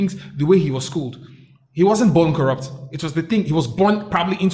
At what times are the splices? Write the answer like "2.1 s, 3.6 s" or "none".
none

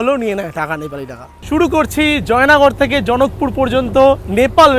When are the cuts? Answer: 1.3 s

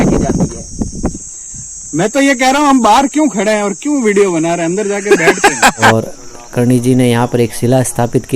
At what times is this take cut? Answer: 1.3 s, 5.9 s

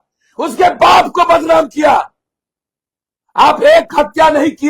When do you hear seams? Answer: none

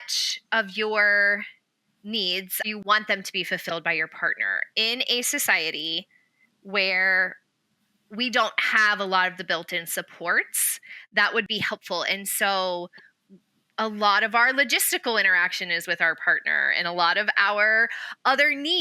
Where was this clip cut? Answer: 2.7 s, 11.5 s

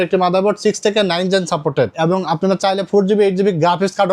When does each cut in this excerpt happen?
1.9 s

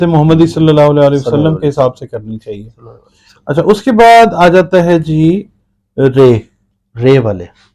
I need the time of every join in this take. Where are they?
none

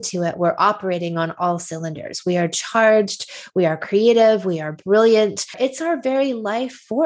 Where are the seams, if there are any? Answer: 5.6 s

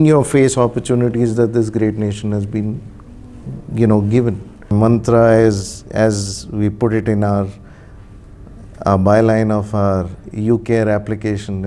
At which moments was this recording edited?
4.7 s

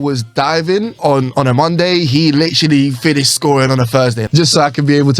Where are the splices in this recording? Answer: 0.9 s, 4.2 s

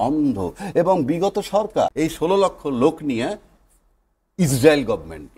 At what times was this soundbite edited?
1.9 s

